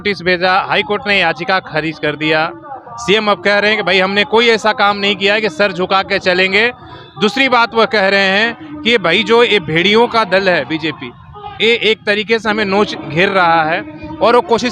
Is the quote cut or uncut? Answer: uncut